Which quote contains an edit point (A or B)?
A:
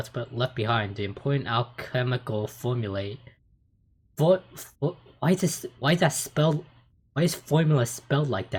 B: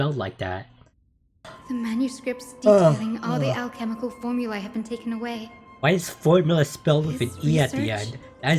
B